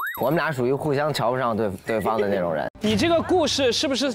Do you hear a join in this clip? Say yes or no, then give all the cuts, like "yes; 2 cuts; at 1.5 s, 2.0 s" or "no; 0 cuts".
yes; 1 cut; at 2.7 s